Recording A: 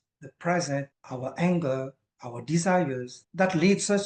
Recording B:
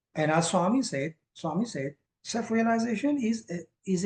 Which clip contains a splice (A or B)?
A